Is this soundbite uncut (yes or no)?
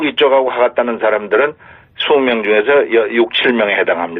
no